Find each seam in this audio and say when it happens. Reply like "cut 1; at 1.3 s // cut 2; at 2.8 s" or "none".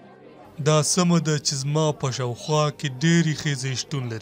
none